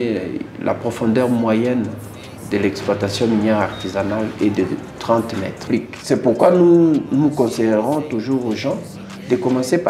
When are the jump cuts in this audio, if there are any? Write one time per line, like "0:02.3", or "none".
0:05.7